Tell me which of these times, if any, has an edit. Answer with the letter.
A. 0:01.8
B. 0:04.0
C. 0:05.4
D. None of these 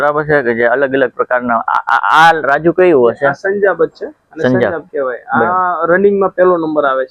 D